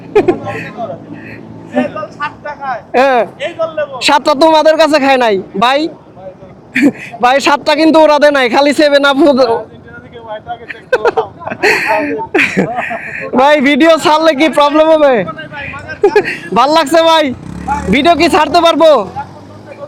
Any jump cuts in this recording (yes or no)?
no